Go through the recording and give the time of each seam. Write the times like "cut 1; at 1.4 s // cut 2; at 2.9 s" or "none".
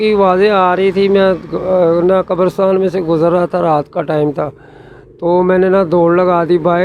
none